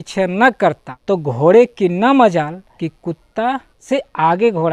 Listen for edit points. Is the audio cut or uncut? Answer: cut